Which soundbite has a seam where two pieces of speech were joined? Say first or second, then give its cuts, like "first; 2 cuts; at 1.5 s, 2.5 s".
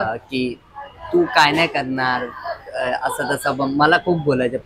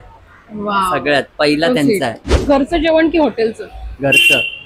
second; 1 cut; at 2.3 s